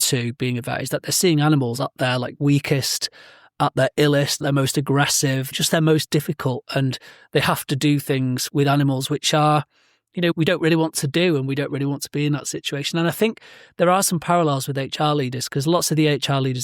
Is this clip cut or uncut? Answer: cut